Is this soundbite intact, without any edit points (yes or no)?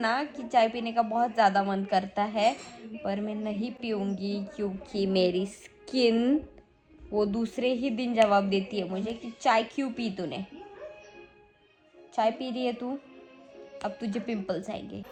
yes